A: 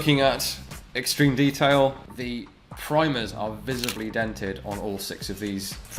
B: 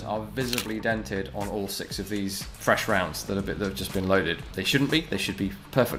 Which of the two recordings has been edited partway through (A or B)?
A